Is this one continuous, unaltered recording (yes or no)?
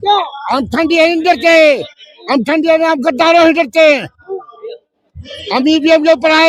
yes